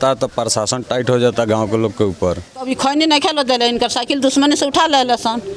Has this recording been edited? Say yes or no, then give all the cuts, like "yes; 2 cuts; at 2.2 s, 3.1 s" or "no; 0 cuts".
yes; 1 cut; at 2.5 s